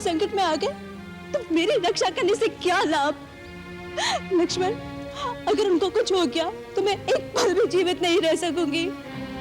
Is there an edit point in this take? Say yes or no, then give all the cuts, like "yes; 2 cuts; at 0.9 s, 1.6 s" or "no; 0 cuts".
no; 0 cuts